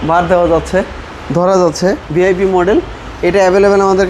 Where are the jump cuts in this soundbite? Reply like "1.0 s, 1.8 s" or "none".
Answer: 2.0 s